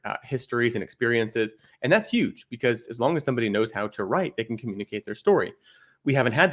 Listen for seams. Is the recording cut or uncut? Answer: uncut